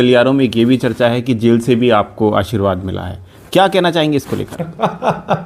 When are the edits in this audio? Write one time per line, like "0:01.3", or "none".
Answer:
none